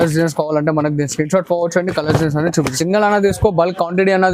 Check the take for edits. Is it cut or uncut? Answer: cut